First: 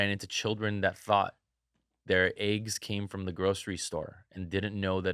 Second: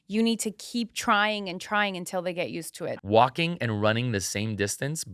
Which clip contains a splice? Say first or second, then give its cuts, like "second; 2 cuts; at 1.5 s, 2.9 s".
second; 1 cut; at 2.9 s